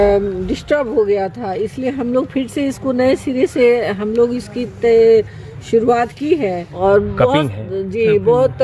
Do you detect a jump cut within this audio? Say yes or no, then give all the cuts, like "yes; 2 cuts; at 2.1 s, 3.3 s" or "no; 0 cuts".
yes; 1 cut; at 6.7 s